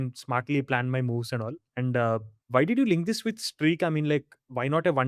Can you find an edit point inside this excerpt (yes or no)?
yes